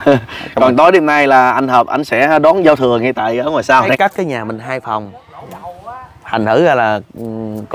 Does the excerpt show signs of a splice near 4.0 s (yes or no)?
yes